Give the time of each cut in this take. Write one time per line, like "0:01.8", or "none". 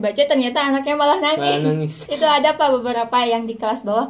0:02.0